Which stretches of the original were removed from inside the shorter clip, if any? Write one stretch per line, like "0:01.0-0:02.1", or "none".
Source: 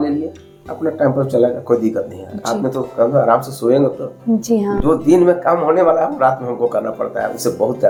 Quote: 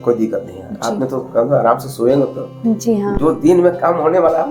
none